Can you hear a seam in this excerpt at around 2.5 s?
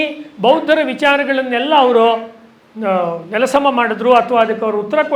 no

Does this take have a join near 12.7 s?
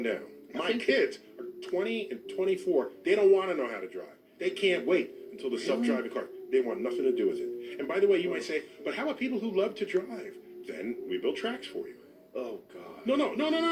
yes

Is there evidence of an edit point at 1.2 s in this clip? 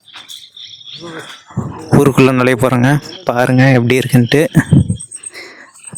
no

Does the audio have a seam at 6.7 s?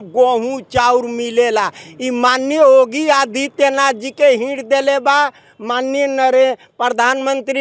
no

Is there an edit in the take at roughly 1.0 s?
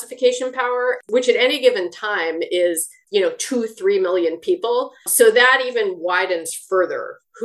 yes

